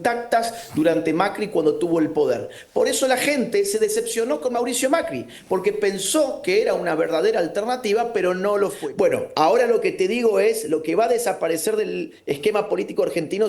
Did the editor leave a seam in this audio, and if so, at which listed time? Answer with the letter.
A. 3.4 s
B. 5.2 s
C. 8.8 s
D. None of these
C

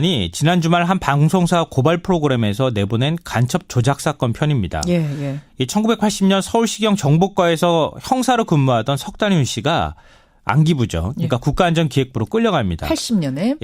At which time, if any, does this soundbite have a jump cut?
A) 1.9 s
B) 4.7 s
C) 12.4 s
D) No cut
B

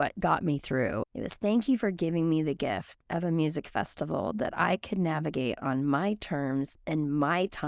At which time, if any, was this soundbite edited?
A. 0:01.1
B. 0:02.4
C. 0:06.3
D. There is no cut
A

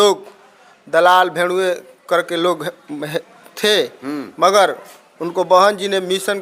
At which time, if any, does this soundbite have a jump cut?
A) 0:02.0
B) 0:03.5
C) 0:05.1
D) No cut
D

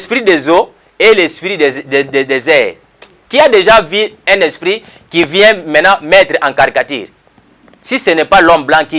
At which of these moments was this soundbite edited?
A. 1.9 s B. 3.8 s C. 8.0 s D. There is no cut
D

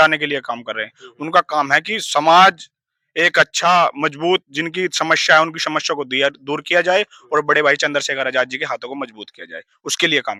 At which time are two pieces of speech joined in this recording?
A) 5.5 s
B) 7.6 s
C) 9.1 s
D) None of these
D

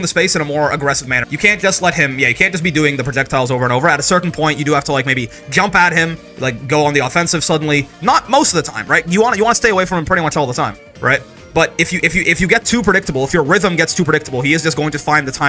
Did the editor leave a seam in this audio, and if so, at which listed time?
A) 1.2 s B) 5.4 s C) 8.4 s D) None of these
A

